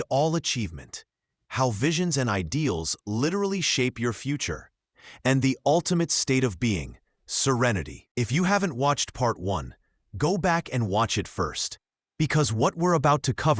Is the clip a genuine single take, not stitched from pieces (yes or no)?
no